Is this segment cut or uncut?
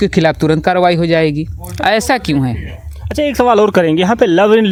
uncut